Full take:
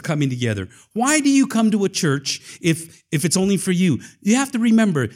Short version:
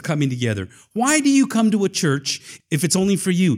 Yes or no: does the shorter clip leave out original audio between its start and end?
yes